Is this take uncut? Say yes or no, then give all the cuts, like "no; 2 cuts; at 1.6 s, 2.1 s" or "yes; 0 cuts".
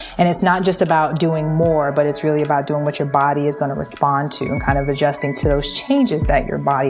yes; 0 cuts